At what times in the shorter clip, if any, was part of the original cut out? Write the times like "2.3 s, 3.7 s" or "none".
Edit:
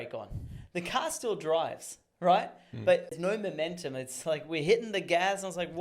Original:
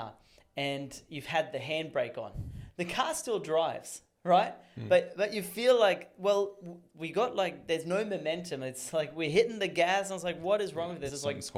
3.1 s

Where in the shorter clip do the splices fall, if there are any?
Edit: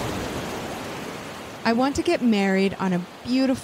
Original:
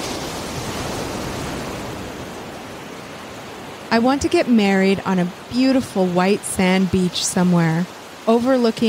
1.5 s

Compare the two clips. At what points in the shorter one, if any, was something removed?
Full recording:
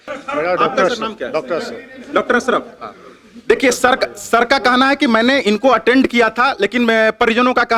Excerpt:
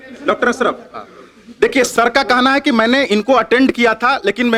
1.9 s

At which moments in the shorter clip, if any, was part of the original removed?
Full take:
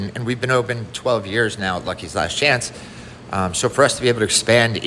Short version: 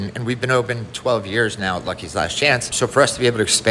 2.7 s

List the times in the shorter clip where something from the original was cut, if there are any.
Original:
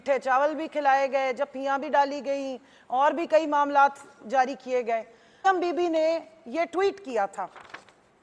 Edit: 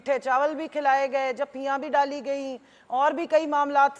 none

